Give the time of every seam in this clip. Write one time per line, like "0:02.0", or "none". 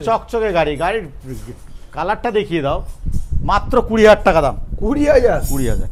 none